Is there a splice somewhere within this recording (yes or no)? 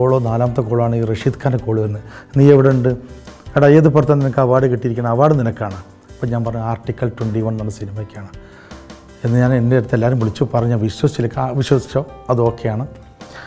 no